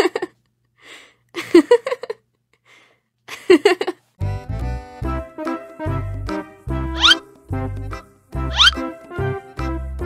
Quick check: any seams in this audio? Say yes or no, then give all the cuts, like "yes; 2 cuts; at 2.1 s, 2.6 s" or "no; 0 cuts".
yes; 2 cuts; at 4.3 s, 6.7 s